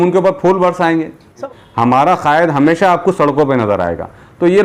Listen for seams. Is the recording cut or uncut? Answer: cut